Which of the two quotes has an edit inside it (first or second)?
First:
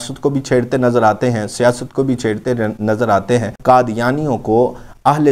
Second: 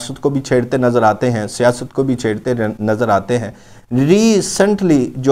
first